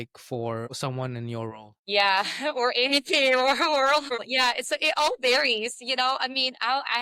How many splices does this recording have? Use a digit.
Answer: 0